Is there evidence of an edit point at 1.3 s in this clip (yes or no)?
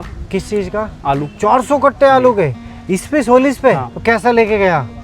yes